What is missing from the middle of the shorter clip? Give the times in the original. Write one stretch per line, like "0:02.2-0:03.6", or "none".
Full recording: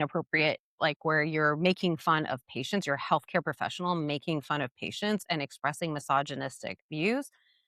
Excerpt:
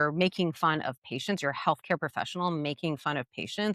none